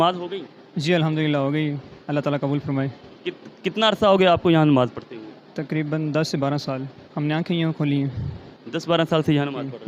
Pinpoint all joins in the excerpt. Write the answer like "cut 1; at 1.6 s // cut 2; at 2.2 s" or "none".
none